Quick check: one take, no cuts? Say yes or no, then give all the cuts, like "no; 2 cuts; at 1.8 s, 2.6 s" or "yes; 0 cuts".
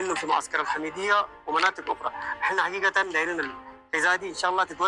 yes; 0 cuts